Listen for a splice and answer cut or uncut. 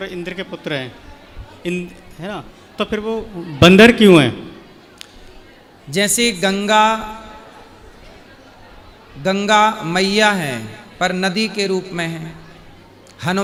uncut